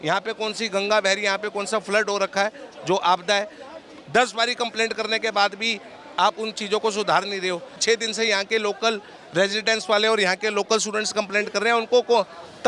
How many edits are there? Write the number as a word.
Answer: one